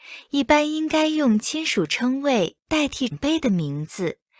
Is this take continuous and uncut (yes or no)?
no